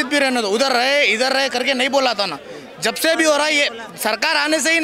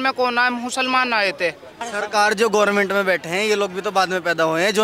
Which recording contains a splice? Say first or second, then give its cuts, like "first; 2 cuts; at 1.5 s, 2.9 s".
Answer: second; 1 cut; at 1.8 s